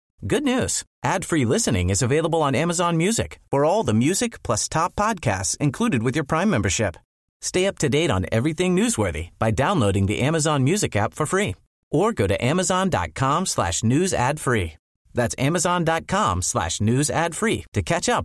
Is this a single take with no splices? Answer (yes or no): yes